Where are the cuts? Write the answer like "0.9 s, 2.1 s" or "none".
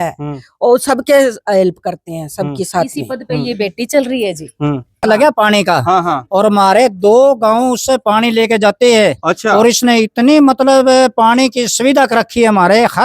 5.0 s